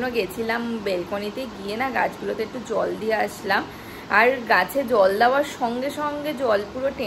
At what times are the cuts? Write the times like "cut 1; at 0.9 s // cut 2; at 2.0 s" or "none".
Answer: none

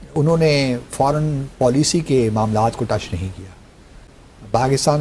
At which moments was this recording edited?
none

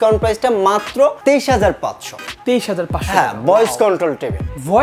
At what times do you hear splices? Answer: none

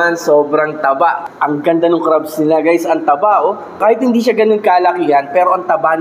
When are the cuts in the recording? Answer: cut 1; at 1.2 s // cut 2; at 3.8 s

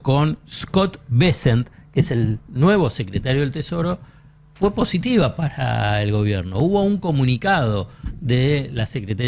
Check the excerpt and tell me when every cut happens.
none

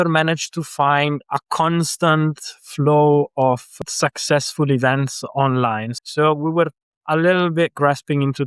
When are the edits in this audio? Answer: cut 1; at 1.2 s // cut 2; at 3.7 s // cut 3; at 5.9 s

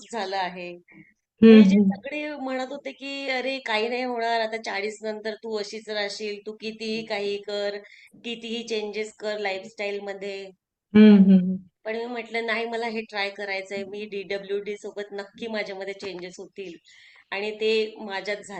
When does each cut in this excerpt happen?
none

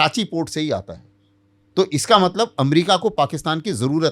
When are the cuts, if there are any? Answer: none

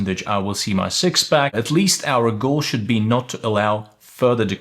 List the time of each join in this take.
cut 1; at 1.6 s

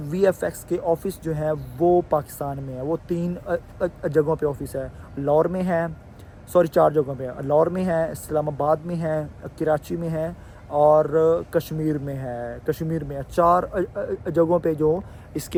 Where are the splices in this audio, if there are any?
none

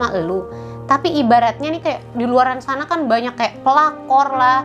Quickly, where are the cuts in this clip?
none

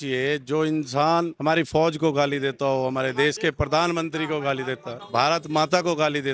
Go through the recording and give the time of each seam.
cut 1; at 4.9 s

